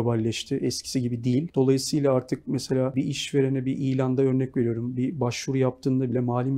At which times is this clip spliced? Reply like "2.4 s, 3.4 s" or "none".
1.5 s, 2.9 s